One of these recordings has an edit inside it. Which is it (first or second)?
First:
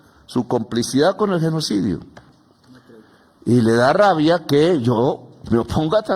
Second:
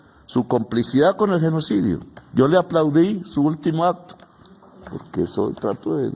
first